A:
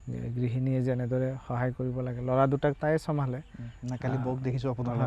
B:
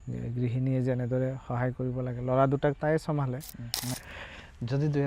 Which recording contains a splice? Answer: B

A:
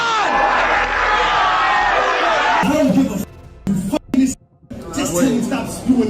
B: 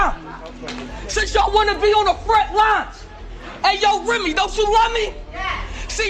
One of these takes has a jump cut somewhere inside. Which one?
A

